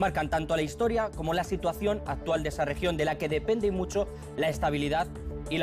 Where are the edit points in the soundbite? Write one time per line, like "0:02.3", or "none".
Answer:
none